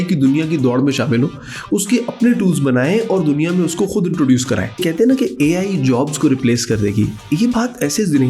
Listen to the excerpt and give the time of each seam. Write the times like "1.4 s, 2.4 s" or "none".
4.8 s

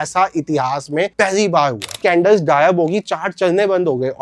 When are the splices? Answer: 2.0 s

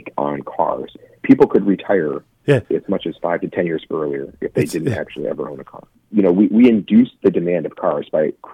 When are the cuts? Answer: 0.9 s, 2.6 s, 6.0 s

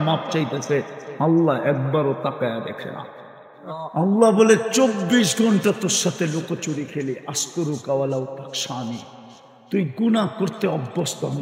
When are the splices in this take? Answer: 3.9 s

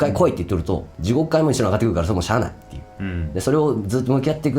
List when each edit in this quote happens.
0.9 s

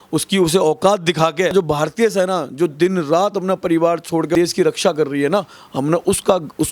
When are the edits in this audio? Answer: 1.5 s, 4.3 s

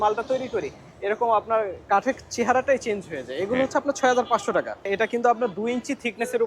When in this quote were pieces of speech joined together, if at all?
4.9 s

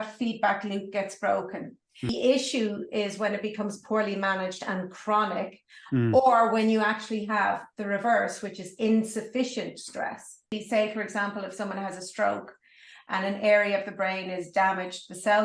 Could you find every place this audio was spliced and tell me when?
2.1 s, 10.6 s

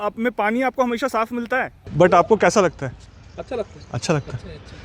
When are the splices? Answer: 1.8 s

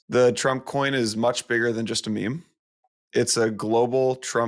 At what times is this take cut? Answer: none

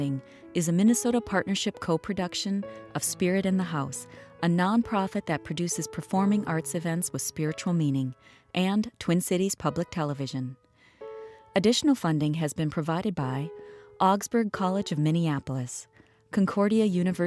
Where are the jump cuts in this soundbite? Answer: none

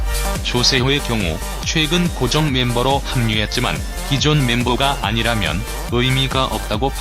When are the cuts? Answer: 3.2 s

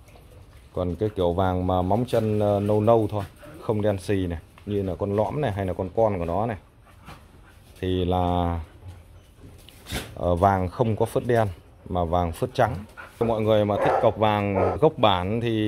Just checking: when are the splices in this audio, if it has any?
13.2 s, 14.8 s

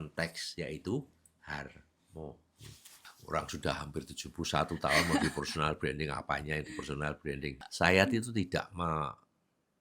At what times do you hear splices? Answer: 2.9 s, 7.5 s

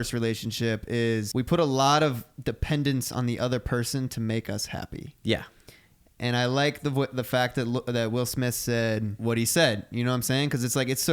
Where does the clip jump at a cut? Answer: 1.3 s, 9.1 s

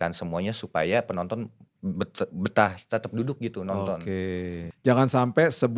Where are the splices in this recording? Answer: 4.7 s

